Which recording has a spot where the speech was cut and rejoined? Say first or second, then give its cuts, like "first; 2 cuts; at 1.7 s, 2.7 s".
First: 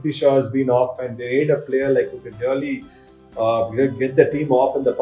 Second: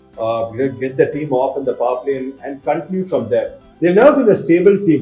second; 1 cut; at 3.6 s